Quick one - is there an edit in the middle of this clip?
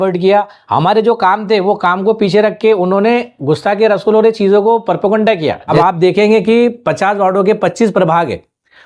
yes; 1 cut; at 5.7 s

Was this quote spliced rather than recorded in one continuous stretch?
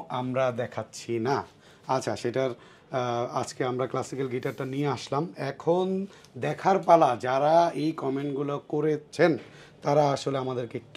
no; 0 cuts

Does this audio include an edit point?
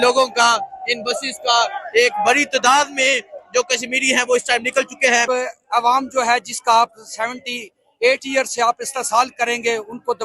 yes; 1 cut; at 5.2 s

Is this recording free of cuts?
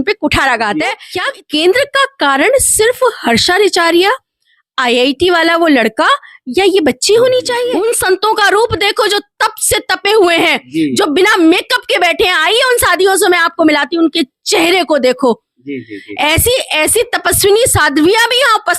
no; 2 cuts; at 1.1 s, 7.7 s

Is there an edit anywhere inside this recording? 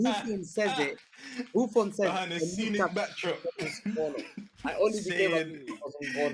no; 0 cuts

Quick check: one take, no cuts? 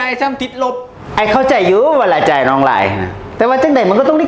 yes; 0 cuts

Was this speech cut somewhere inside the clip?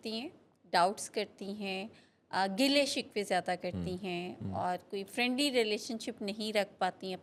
no; 0 cuts

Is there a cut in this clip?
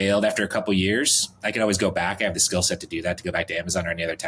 no; 0 cuts

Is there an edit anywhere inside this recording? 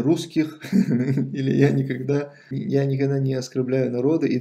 no; 0 cuts

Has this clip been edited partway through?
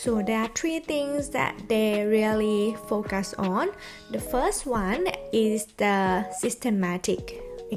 no; 0 cuts

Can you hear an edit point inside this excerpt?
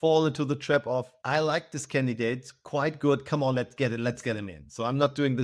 yes; 1 cut; at 1.1 s

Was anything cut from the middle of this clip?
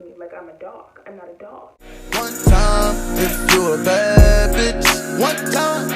yes; 1 cut; at 1.8 s

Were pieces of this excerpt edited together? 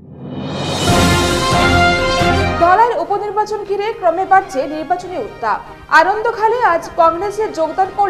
yes; 1 cut; at 2.2 s

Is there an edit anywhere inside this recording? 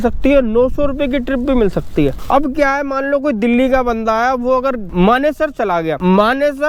no; 0 cuts

